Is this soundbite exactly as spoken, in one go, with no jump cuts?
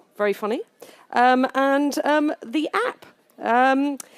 yes; 0 cuts

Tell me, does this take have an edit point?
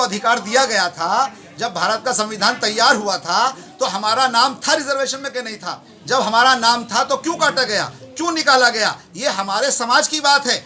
no; 0 cuts

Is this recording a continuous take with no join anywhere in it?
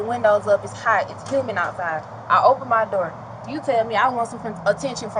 yes; 0 cuts

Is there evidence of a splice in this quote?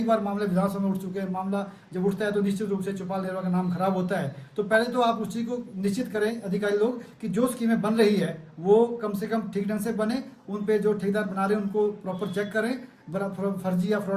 no; 0 cuts

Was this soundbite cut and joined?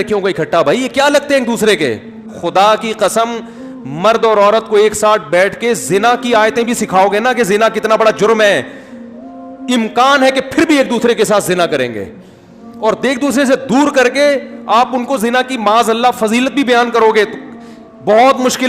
yes; 1 cut; at 2.4 s

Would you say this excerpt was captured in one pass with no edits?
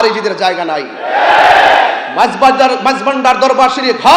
yes; 0 cuts

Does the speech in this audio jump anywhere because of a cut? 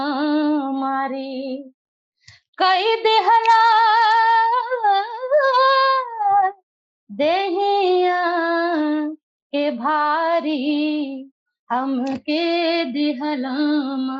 no; 0 cuts

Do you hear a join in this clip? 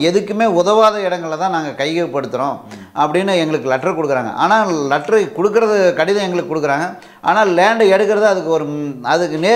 no; 0 cuts

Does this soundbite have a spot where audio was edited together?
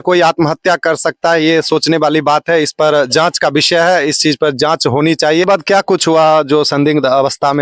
yes; 1 cut; at 5.4 s

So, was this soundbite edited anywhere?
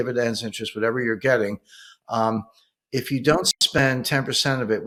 no; 0 cuts

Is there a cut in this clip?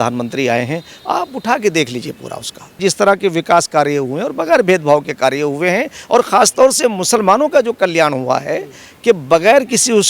yes; 1 cut; at 2.8 s

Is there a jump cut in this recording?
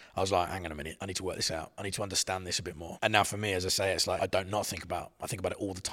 yes; 3 cuts; at 0.9 s, 2.8 s, 4.2 s

